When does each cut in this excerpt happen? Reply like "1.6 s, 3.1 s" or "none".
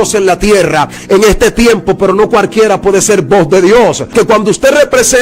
4.1 s

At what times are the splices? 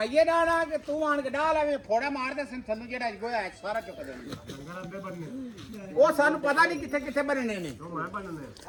none

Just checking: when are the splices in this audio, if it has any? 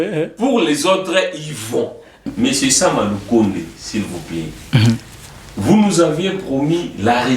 2.3 s

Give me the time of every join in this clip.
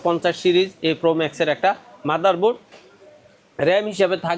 none

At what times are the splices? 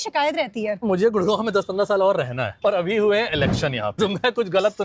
0.8 s, 2.5 s, 4.0 s

